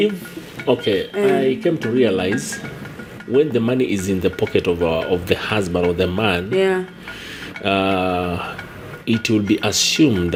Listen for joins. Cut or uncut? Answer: uncut